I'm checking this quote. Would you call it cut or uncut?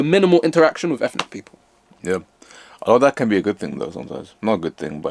uncut